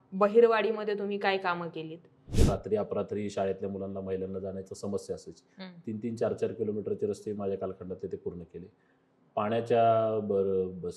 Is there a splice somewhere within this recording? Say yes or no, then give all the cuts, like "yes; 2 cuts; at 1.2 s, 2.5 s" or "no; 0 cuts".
yes; 1 cut; at 2.3 s